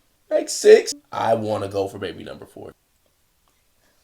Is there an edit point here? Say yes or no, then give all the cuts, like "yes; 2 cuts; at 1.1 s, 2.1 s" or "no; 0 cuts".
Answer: yes; 2 cuts; at 0.9 s, 2.7 s